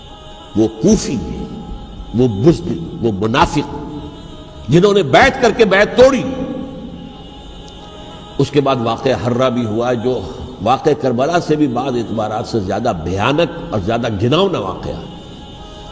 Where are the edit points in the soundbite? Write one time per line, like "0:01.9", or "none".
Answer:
0:07.2